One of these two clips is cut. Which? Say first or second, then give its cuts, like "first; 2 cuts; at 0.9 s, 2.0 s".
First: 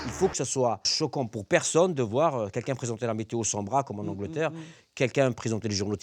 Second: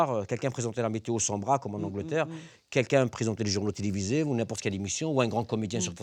first; 1 cut; at 0.9 s